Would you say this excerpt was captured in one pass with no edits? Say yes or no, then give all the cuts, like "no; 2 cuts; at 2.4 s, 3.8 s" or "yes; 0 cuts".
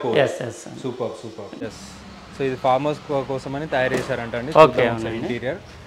no; 1 cut; at 1.8 s